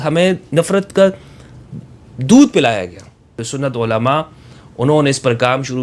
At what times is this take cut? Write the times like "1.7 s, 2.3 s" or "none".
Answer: 3.4 s